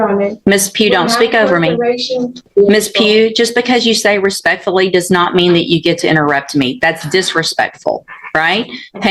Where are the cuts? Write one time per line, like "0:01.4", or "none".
0:02.5